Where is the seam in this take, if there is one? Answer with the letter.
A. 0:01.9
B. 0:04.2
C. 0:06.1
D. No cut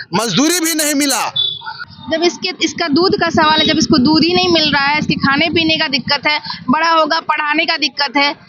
A